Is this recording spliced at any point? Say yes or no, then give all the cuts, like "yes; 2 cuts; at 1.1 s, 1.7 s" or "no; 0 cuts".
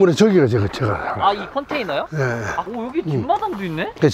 yes; 1 cut; at 2.7 s